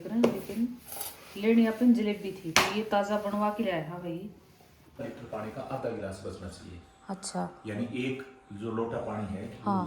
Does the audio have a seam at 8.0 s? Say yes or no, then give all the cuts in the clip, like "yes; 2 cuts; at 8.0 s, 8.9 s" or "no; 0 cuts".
no; 1 cut; at 5.0 s